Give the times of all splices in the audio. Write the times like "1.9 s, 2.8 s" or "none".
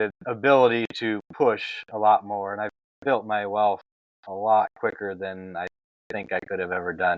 none